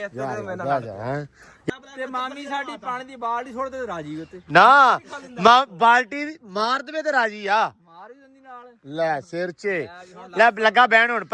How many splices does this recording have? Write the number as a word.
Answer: one